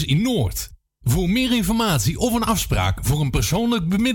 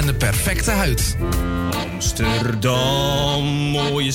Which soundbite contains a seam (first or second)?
second